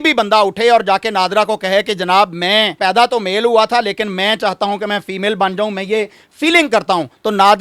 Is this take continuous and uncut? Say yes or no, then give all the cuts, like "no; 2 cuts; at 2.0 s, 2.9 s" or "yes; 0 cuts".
yes; 0 cuts